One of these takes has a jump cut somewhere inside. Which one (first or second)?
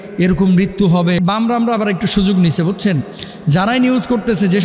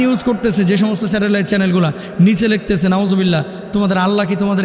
first